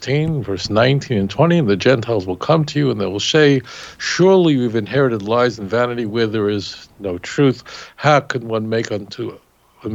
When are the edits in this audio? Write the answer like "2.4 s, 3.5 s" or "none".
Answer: none